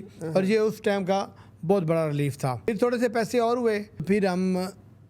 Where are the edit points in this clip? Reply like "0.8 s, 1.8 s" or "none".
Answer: 2.7 s, 4.0 s